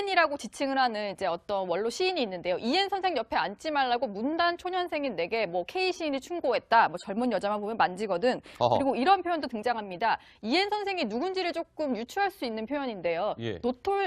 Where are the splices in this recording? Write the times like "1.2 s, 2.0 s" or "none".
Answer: 6.2 s